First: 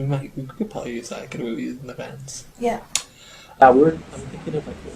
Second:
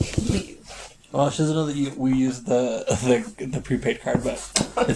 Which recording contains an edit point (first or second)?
first